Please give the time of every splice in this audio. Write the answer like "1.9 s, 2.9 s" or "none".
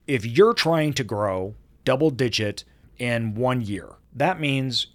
1.8 s, 2.8 s, 4.0 s